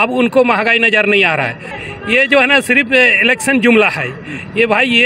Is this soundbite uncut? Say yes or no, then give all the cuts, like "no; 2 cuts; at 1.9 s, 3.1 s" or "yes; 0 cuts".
no; 1 cut; at 1.7 s